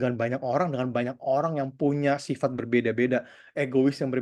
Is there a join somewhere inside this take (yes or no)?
no